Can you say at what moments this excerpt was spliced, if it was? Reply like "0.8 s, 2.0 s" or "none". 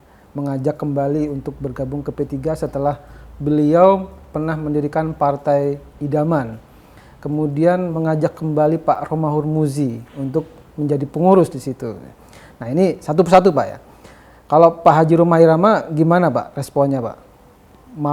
none